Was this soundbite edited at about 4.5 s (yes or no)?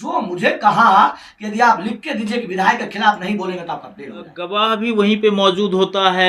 yes